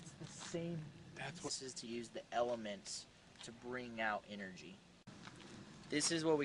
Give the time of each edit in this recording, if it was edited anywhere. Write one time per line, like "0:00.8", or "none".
none